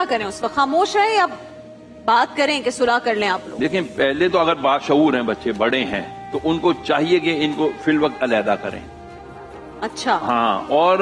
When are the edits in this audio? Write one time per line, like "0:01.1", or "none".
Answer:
none